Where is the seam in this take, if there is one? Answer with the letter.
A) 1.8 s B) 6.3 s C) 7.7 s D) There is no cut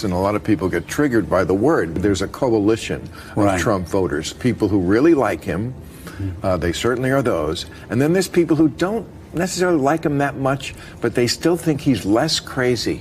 A